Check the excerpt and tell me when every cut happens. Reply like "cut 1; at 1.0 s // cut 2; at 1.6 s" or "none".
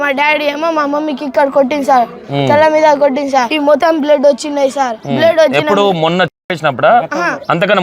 cut 1; at 3.7 s // cut 2; at 5.0 s